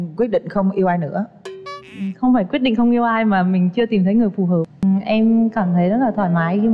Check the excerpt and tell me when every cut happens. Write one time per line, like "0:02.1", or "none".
0:04.7